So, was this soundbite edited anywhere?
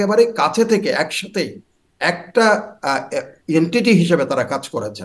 no; 0 cuts

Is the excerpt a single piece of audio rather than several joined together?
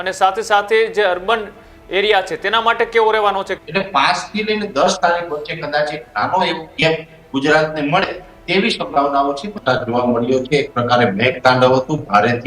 no; 2 cuts; at 3.6 s, 9.6 s

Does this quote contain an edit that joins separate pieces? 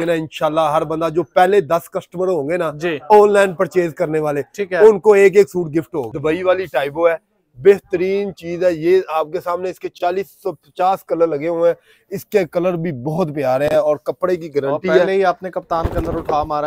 no; 0 cuts

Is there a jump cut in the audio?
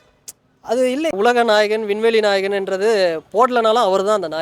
yes; 1 cut; at 1.1 s

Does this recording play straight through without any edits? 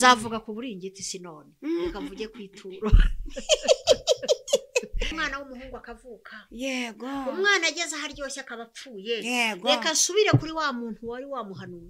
no; 1 cut; at 5.1 s

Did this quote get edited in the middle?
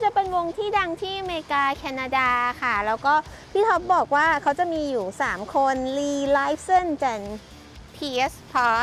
no; 0 cuts

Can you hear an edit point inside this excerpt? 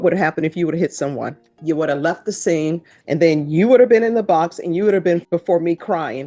yes; 3 cuts; at 1.5 s, 2.9 s, 5.2 s

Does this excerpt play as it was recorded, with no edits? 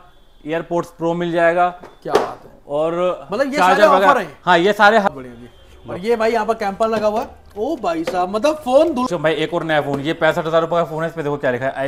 no; 2 cuts; at 5.1 s, 9.1 s

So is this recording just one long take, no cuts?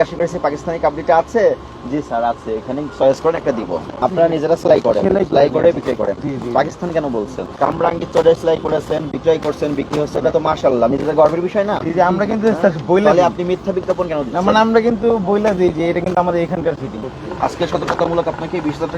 no; 3 cuts; at 4.0 s, 7.4 s, 16.9 s

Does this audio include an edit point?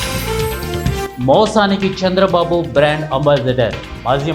yes; 1 cut; at 1.0 s

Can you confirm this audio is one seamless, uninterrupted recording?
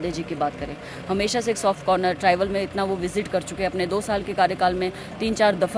yes; 0 cuts

